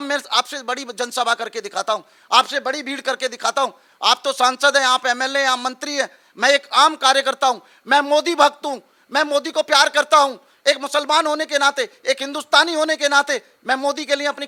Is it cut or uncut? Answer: uncut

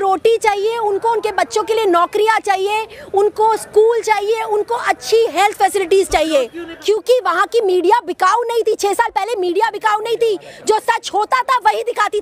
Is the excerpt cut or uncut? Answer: cut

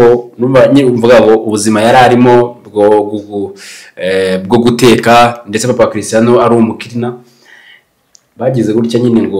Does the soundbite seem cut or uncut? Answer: uncut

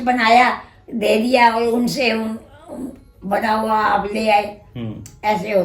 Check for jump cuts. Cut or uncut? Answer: uncut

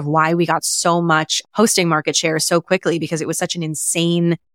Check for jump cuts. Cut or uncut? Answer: uncut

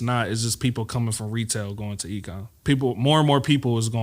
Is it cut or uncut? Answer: cut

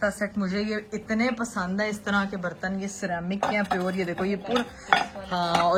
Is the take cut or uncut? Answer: uncut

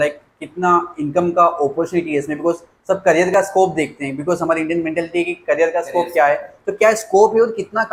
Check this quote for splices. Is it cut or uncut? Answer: uncut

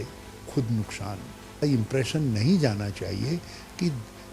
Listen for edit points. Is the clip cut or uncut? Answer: cut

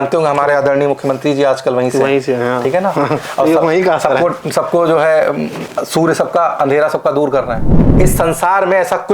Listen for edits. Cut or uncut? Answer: cut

